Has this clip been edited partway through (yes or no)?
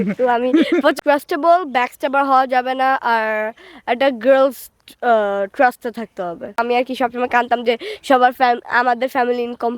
yes